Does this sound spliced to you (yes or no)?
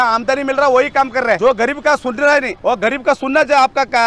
yes